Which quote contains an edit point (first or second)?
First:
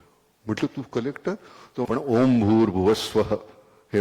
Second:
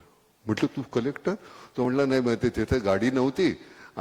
first